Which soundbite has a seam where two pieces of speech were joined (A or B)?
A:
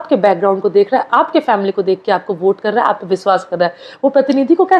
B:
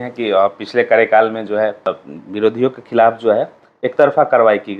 B